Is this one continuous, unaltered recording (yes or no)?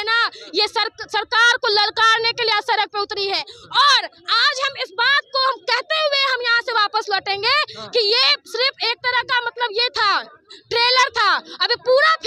yes